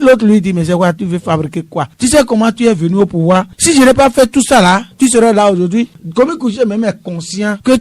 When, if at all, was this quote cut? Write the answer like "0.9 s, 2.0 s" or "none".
5.9 s